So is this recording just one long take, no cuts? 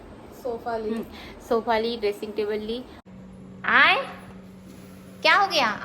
no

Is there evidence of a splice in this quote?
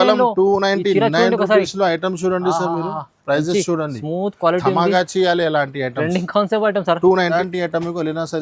yes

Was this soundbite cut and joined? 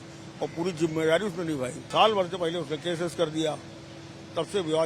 yes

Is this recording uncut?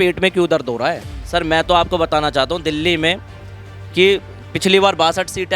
no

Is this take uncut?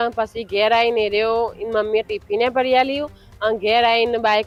yes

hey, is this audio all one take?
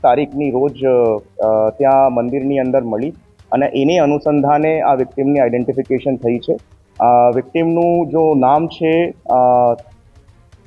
yes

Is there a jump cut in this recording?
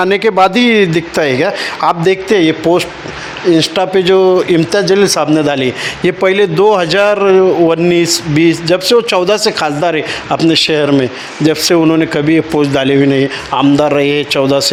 no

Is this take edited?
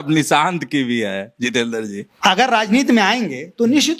yes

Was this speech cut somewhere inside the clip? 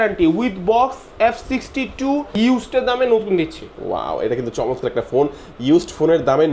yes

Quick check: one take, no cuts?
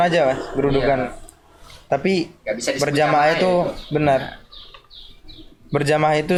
yes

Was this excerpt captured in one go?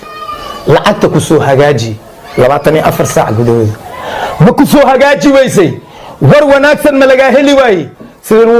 yes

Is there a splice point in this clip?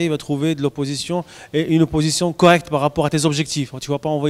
no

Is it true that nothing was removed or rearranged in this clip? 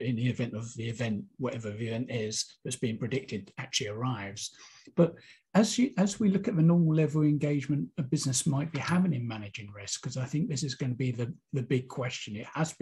yes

